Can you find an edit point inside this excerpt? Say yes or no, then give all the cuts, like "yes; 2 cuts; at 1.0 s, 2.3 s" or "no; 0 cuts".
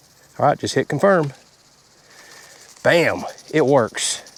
no; 0 cuts